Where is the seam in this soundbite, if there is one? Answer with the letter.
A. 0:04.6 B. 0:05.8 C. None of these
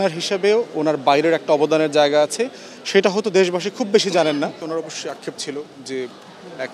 A